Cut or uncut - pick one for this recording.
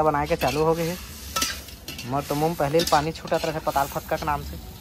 uncut